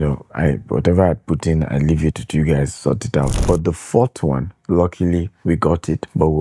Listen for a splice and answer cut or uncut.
cut